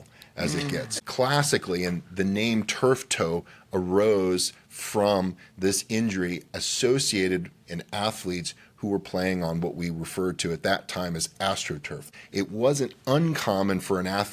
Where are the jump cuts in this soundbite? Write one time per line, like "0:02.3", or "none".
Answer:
0:00.9
0:12.1